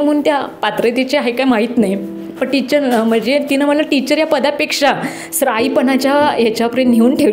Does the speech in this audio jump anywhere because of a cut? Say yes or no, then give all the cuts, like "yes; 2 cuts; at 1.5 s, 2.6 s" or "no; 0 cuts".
no; 0 cuts